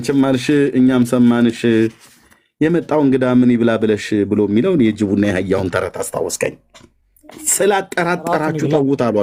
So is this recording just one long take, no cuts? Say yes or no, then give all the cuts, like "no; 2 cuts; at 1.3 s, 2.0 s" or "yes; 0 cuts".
yes; 0 cuts